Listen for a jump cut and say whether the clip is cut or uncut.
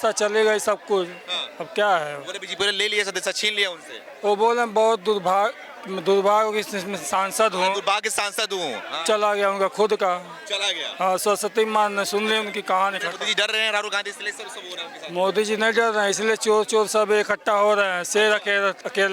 uncut